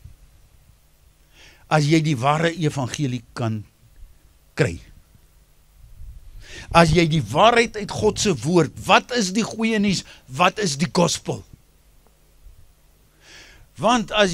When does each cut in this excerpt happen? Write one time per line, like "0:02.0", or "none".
none

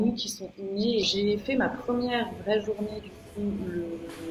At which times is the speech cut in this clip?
0:01.0

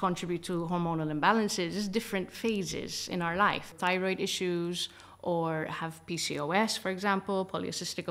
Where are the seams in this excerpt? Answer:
0:03.7

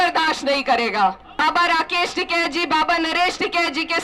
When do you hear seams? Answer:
0:01.3

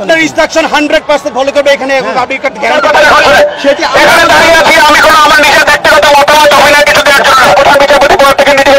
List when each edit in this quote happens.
0:02.8
0:07.5

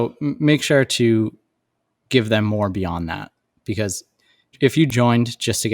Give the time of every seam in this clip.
0:04.5

